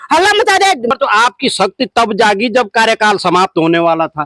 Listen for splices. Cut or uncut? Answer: cut